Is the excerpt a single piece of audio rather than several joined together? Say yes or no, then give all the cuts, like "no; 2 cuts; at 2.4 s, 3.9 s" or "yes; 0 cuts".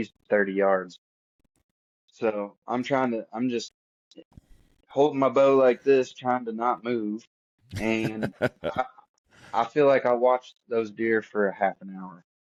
yes; 0 cuts